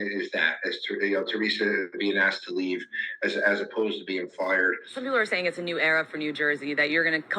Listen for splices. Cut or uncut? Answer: cut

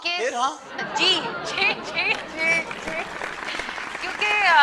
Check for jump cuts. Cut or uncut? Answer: uncut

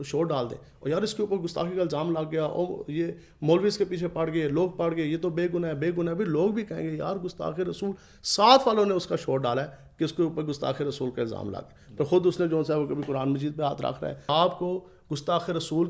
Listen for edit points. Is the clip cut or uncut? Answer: cut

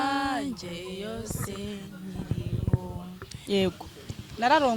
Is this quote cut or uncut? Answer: cut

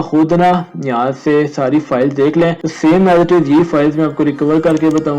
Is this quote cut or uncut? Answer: cut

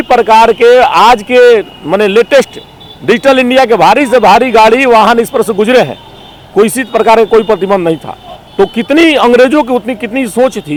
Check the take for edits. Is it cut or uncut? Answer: uncut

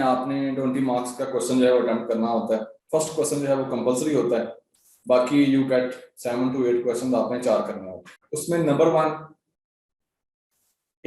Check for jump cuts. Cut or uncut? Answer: cut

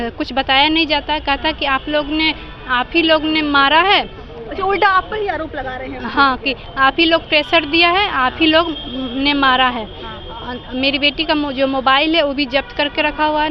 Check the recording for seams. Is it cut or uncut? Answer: uncut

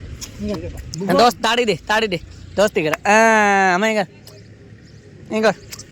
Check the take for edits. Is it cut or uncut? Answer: uncut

